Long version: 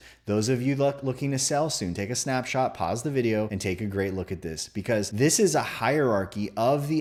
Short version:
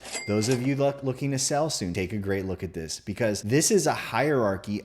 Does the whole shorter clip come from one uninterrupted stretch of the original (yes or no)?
no